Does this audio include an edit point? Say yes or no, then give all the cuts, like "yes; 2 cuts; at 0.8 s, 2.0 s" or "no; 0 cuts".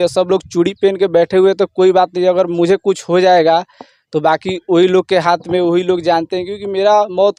no; 0 cuts